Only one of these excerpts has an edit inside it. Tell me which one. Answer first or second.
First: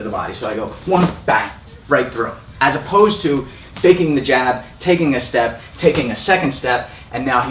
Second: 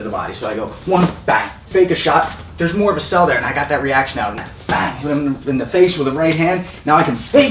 second